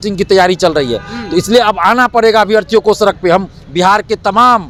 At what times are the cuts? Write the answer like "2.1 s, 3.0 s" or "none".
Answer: none